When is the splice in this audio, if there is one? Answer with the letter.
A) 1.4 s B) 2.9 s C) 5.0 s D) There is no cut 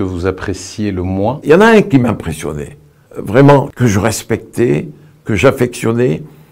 A